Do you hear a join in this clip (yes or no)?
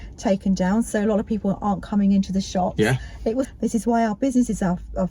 yes